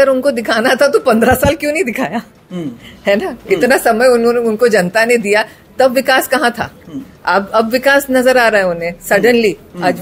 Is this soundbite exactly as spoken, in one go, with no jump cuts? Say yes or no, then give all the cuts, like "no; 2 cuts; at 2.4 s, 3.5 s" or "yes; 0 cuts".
yes; 0 cuts